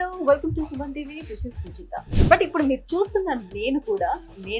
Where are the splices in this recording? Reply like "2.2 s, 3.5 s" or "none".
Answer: 2.1 s